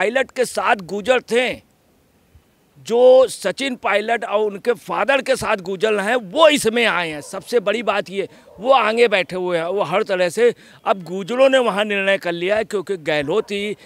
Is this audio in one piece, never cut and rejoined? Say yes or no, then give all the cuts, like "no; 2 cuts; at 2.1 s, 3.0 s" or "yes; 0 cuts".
yes; 0 cuts